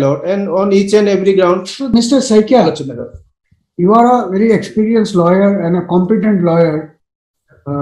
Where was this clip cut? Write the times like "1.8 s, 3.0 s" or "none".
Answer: 1.9 s